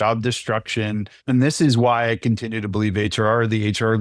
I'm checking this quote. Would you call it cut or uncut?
cut